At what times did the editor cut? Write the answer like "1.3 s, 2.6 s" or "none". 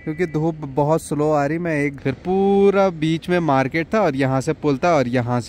1.9 s